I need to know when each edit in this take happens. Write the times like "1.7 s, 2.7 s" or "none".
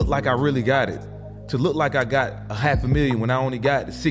none